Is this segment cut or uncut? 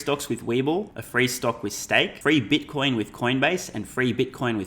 cut